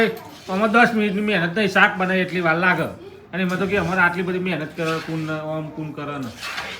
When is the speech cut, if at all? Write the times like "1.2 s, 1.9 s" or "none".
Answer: none